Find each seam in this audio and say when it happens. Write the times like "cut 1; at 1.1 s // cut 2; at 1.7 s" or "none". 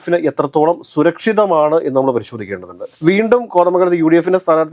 cut 1; at 2.9 s